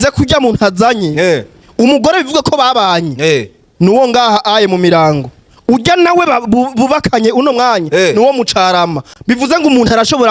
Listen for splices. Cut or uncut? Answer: uncut